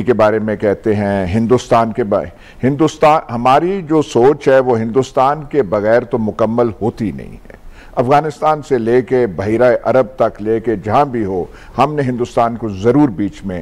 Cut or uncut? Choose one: uncut